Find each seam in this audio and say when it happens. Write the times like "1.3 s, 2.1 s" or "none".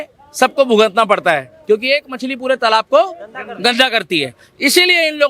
none